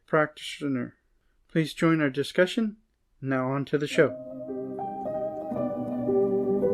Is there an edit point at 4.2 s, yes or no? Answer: yes